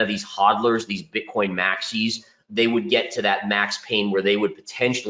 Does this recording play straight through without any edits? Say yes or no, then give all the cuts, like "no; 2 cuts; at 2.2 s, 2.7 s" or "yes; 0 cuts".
yes; 0 cuts